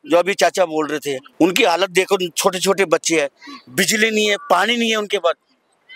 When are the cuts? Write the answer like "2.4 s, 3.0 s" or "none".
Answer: 1.2 s